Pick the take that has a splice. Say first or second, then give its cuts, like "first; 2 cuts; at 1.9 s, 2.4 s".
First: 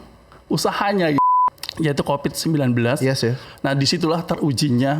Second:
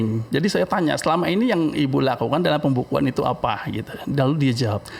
first; 1 cut; at 1.2 s